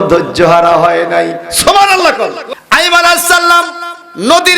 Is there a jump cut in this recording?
yes; 1 cut; at 2.4 s

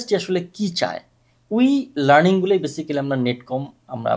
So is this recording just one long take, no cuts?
yes; 0 cuts

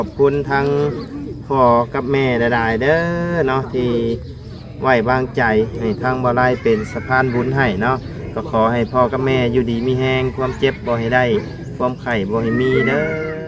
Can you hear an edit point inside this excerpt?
no; 0 cuts

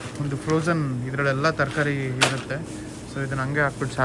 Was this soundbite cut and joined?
no; 0 cuts

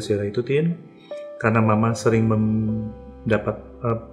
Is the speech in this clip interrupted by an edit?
no; 0 cuts

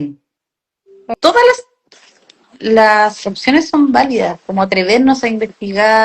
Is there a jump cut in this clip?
yes; 1 cut; at 1.1 s

